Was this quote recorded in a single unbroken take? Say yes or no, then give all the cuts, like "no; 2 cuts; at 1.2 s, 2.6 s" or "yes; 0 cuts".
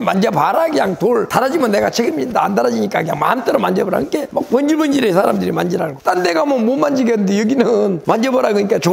yes; 0 cuts